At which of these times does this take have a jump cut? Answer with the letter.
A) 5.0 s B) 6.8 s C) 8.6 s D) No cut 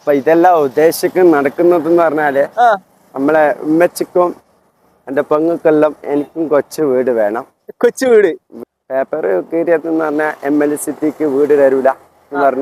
C